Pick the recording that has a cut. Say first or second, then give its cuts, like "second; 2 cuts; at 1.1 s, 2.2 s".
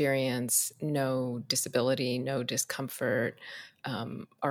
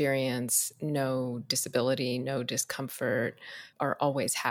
second; 1 cut; at 3.6 s